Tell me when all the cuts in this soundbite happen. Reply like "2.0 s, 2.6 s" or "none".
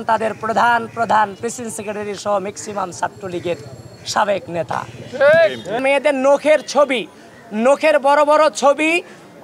5.8 s

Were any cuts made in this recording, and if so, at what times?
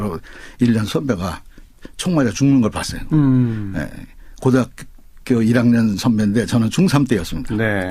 5.2 s

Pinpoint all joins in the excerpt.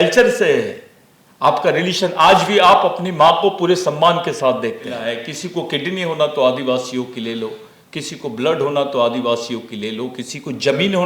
5.2 s

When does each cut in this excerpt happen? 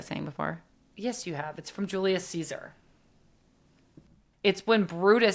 4.2 s

